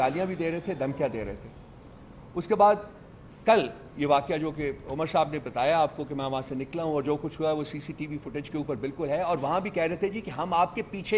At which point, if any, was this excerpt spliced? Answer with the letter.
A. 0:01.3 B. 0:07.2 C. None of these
C